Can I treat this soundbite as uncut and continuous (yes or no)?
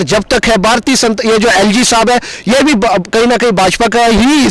yes